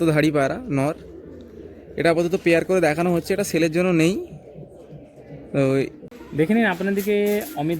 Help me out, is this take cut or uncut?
cut